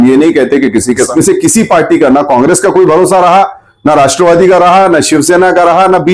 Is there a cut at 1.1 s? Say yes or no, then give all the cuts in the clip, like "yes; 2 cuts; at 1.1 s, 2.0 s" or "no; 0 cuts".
yes; 1 cut; at 1.1 s